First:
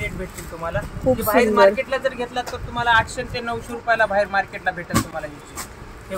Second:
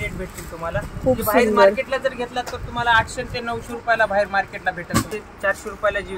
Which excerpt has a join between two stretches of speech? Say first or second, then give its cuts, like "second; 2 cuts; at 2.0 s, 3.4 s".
second; 1 cut; at 5.1 s